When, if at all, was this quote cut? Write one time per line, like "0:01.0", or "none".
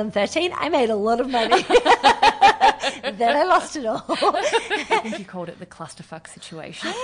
0:05.2